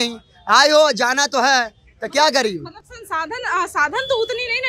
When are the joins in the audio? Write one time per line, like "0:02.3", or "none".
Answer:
none